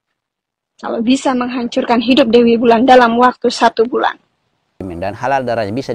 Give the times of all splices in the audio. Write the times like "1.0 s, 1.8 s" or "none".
4.8 s